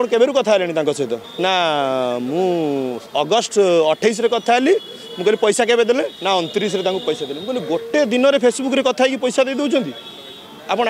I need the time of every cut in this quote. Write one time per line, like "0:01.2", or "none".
0:01.2

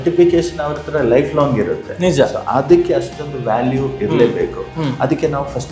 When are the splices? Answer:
none

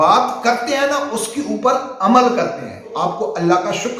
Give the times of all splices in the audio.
0:02.9

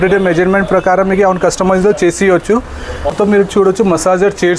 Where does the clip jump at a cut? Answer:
0:03.1

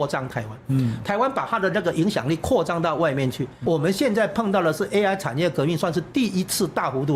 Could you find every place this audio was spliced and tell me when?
0:03.5

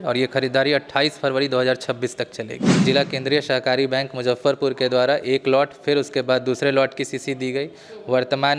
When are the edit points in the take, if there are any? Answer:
0:02.8

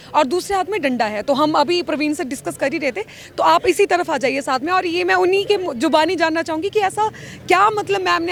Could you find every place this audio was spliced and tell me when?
none

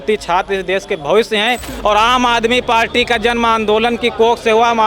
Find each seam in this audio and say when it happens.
0:01.7

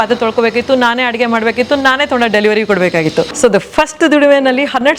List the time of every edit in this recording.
0:03.3

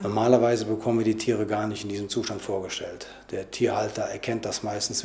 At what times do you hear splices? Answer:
none

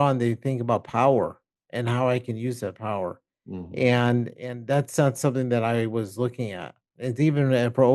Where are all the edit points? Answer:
none

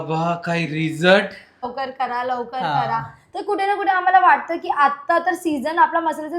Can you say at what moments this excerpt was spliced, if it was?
0:01.7

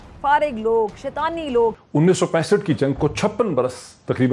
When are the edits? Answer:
0:01.8

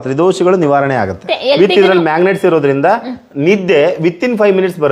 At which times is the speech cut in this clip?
0:01.3

